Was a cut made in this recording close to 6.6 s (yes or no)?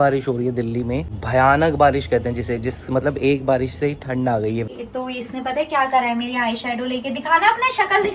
no